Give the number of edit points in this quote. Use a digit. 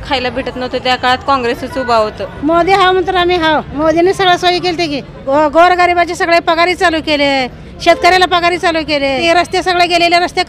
4